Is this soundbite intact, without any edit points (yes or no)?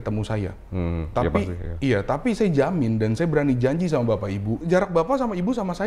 no